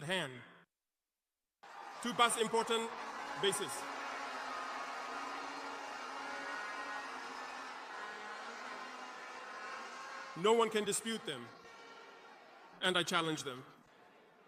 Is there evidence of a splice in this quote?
no; 0 cuts

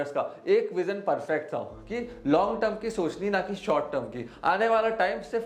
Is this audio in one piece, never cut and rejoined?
yes; 0 cuts

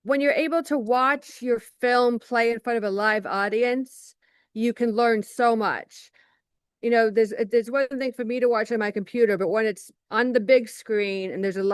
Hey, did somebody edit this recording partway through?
no; 0 cuts

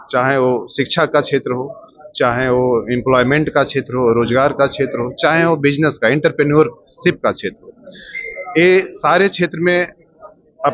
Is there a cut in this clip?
no; 0 cuts

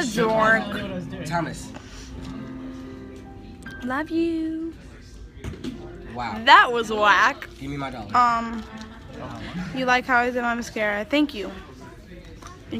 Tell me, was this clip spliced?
yes; 1 cut; at 7.9 s

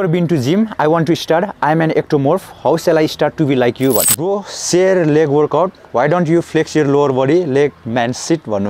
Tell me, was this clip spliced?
yes; 1 cut; at 4.0 s

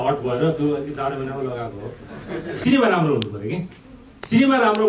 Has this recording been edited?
yes; 1 cut; at 2.5 s

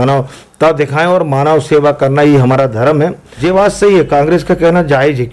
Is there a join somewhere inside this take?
yes; 1 cut; at 3.4 s

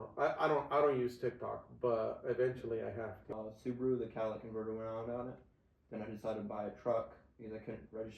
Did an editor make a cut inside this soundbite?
yes; 1 cut; at 3.3 s

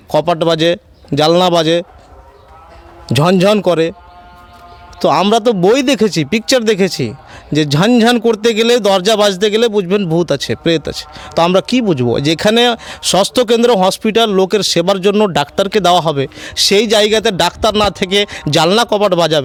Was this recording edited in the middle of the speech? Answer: no; 0 cuts

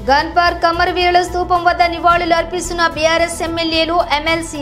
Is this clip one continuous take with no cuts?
yes; 0 cuts

